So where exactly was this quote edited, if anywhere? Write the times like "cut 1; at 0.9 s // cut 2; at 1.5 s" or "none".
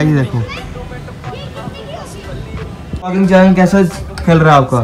cut 1; at 3.0 s